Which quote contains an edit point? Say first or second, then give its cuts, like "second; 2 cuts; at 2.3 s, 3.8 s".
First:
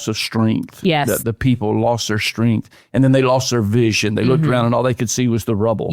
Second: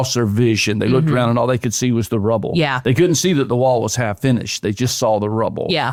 first; 1 cut; at 1.2 s